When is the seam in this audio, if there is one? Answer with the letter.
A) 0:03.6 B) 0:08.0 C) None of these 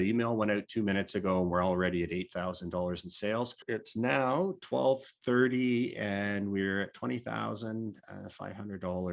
A